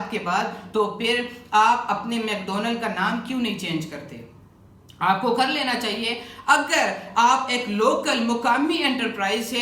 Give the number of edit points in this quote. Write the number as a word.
zero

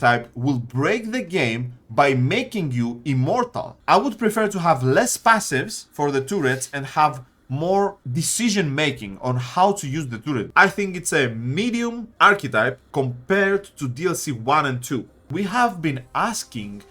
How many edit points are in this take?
three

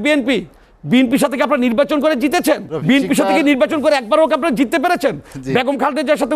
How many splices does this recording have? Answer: one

